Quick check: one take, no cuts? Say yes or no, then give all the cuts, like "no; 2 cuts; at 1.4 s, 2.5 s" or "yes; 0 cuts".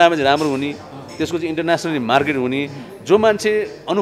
yes; 0 cuts